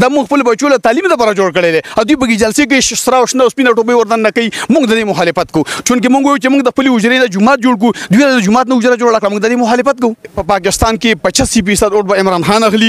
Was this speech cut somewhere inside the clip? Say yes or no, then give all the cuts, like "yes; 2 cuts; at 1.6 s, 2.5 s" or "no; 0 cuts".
yes; 1 cut; at 10.4 s